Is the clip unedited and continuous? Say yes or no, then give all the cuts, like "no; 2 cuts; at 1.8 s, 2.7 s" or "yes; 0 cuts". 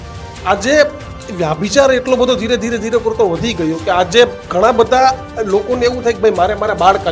yes; 0 cuts